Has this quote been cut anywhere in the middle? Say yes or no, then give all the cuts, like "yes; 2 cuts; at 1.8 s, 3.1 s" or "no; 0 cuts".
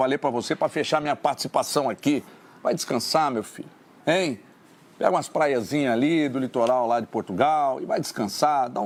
no; 0 cuts